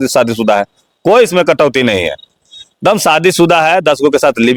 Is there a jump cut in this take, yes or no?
no